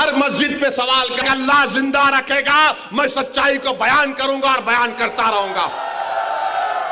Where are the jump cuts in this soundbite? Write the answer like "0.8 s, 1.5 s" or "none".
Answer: 1.2 s

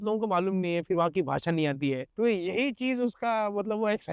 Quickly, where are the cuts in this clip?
2.1 s

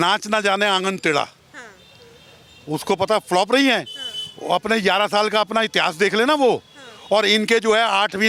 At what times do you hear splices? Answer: none

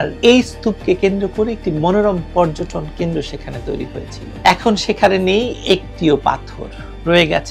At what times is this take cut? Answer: 4.2 s

